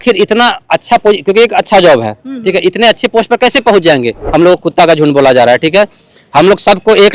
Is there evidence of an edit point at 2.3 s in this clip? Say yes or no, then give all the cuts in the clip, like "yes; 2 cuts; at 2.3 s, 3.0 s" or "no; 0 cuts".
no; 1 cut; at 4.2 s